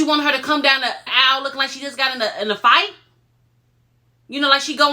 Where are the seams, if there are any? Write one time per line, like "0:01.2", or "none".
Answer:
0:01.1